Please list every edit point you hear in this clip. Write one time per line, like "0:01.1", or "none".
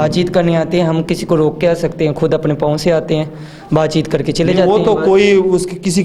none